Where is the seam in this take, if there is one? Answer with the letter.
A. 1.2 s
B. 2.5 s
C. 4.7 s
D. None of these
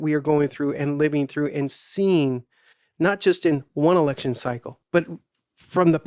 C